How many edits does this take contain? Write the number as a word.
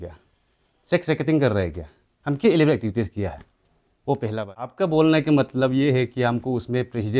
one